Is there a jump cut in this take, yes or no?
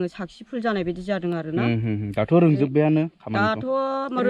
no